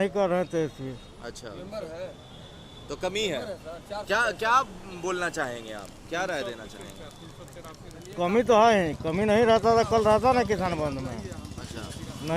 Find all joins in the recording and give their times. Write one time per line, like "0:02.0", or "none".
none